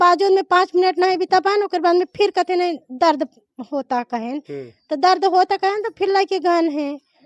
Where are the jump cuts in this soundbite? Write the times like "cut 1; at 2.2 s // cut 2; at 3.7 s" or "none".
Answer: none